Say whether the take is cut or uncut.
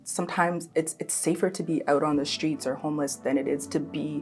uncut